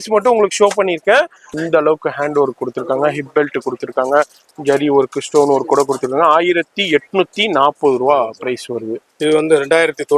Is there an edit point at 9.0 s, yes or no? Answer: yes